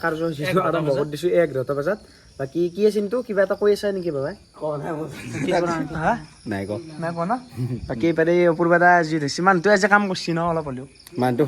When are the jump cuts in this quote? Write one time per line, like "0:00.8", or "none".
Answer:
none